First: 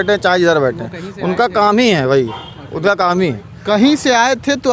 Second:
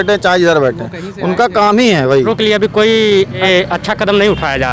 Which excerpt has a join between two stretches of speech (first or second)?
second